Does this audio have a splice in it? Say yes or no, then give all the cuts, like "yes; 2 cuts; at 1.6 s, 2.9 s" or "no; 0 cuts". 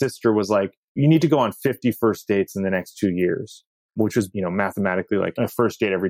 yes; 3 cuts; at 1.0 s, 4.0 s, 5.3 s